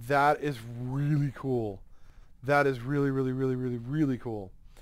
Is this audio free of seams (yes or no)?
yes